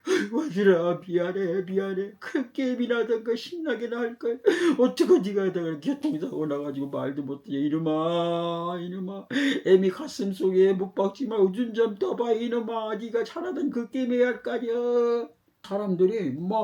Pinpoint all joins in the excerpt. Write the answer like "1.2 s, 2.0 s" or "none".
15.6 s